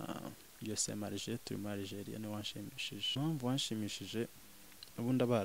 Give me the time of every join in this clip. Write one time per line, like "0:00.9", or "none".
0:03.1